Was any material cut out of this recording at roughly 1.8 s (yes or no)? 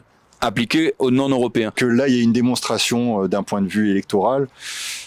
yes